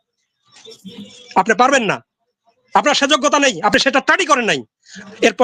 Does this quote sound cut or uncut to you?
uncut